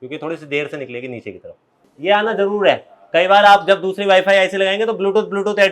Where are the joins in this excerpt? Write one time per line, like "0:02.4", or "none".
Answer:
0:01.8

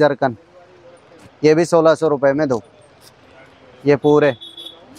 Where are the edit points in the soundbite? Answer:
none

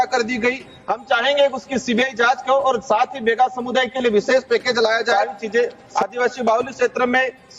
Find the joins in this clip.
0:05.1

